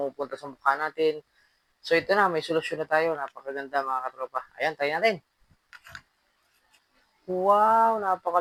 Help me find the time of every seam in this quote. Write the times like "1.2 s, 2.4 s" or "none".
none